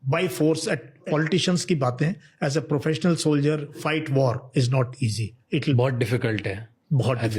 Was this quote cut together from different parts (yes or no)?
yes